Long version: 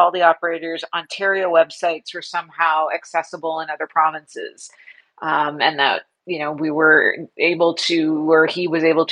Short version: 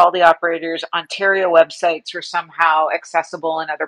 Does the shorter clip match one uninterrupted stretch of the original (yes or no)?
yes